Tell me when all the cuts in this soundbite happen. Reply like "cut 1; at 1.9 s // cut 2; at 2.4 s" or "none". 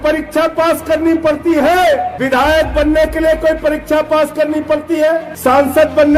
cut 1; at 2.1 s // cut 2; at 5.3 s